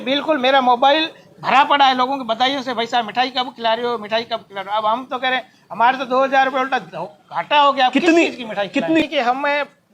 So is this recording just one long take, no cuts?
no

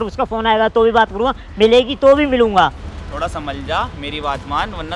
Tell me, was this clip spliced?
yes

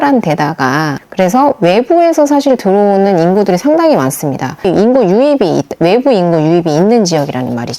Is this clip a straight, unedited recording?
no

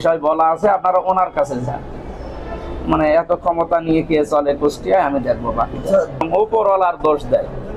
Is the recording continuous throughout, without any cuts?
no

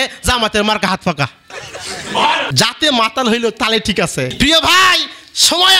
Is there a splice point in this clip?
yes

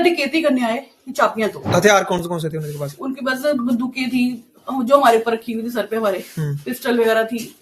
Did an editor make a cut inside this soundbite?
yes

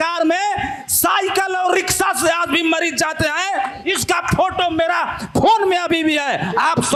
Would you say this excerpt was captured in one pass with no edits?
yes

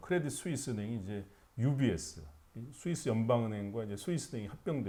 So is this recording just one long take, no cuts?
yes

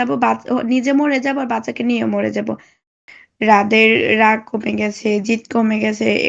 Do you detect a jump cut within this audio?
yes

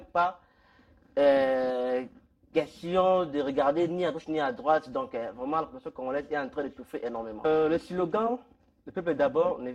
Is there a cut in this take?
no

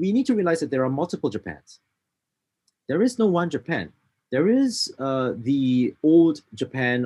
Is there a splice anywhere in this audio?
no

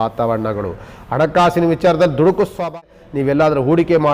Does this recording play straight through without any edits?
no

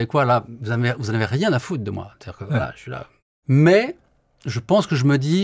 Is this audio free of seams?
no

